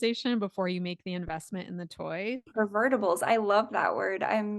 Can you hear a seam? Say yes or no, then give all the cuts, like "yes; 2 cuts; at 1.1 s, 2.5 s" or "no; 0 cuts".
yes; 1 cut; at 2.5 s